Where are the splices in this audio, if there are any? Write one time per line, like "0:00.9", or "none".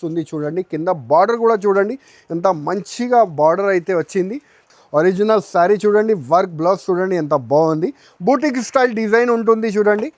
0:04.6